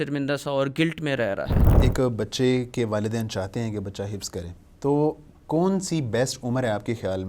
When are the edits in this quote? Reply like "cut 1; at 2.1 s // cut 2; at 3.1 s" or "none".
cut 1; at 1.8 s